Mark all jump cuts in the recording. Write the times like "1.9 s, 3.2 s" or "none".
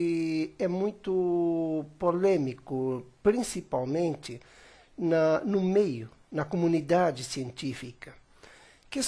8.1 s